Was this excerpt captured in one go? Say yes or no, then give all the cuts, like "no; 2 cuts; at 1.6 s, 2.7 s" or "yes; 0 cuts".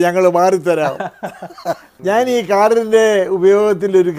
no; 1 cut; at 1.9 s